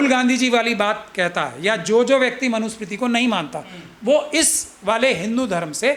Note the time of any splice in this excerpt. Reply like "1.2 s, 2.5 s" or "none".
none